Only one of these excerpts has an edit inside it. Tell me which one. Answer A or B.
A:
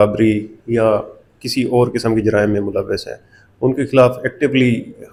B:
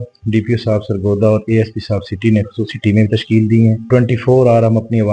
B